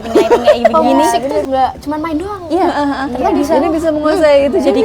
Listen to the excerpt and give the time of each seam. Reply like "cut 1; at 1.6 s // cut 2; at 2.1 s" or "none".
cut 1; at 1.4 s